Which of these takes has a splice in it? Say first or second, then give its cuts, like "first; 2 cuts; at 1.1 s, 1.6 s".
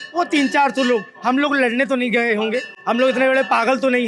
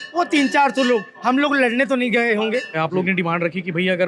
second; 1 cut; at 2.8 s